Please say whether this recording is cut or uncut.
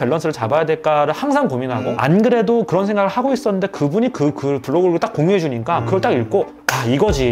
cut